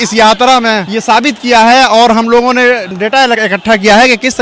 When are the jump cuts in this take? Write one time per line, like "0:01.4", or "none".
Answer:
0:00.9
0:03.3